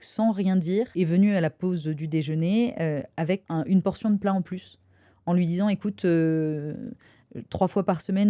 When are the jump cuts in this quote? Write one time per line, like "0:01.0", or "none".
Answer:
0:00.9
0:03.4